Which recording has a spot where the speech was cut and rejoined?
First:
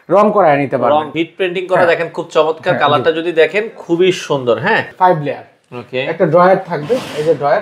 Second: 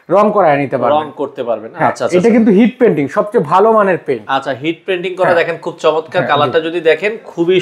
first; 2 cuts; at 1.1 s, 4.9 s

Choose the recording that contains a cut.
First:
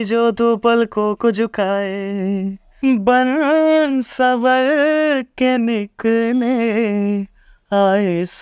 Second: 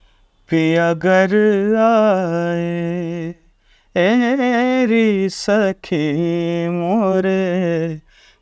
first; 1 cut; at 2.6 s

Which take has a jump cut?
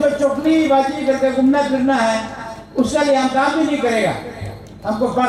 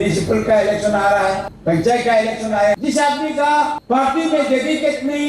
second; 3 cuts; at 1.5 s, 2.8 s, 3.8 s

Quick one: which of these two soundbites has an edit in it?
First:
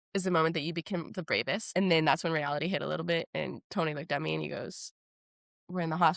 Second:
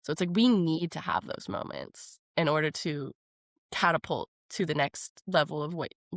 first; 1 cut; at 1.7 s

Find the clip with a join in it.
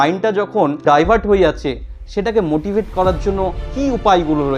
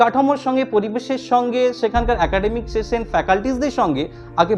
first; 2 cuts; at 0.8 s, 3.6 s

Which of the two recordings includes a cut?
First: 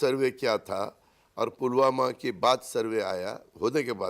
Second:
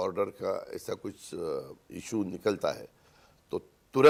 first; 1 cut; at 3.0 s

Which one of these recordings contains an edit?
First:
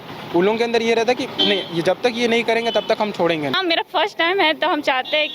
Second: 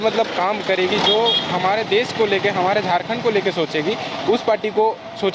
first; 1 cut; at 3.6 s

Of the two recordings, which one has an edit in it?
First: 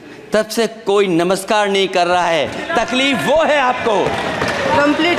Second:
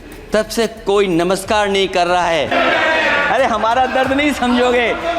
second; 1 cut; at 2.5 s

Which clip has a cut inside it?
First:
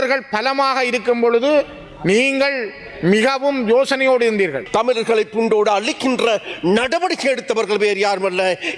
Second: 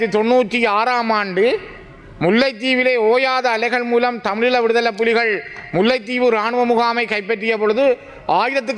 first; 1 cut; at 4.6 s

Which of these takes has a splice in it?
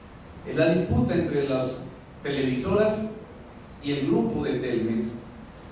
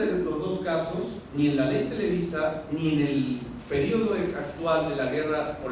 first; 1 cut; at 3.7 s

